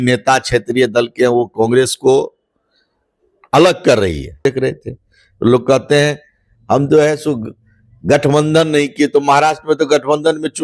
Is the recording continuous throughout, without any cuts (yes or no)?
no